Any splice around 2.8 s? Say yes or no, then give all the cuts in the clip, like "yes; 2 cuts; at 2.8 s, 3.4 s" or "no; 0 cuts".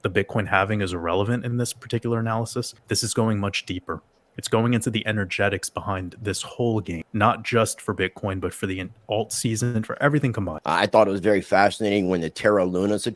yes; 3 cuts; at 2.8 s, 7.0 s, 10.5 s